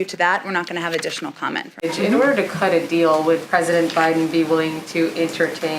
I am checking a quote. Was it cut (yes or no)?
yes